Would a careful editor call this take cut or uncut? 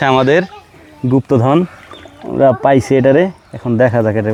uncut